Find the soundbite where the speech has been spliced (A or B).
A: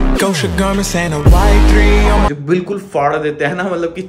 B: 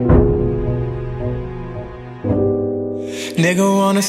A